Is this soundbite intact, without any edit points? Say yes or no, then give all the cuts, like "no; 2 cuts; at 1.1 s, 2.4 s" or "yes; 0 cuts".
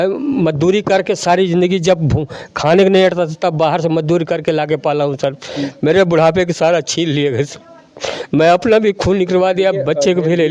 yes; 0 cuts